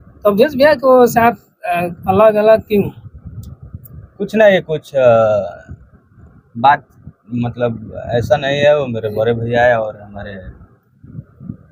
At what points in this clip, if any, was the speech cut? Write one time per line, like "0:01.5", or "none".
none